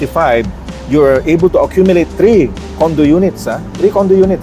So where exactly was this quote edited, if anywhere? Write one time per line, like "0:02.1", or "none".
none